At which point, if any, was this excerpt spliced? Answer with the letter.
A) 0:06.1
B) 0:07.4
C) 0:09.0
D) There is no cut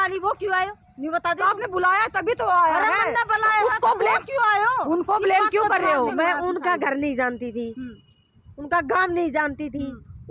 A